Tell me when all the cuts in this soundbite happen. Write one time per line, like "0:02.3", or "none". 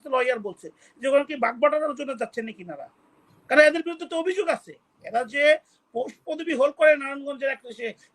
none